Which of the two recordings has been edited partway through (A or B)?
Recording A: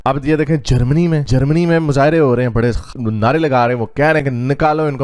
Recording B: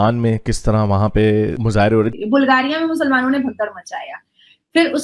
B